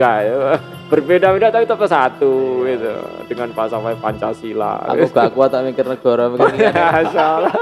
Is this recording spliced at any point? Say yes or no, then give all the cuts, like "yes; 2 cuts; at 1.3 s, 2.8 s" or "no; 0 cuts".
no; 0 cuts